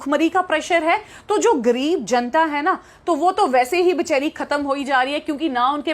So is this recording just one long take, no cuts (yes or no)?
yes